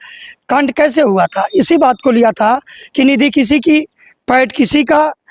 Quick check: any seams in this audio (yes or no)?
no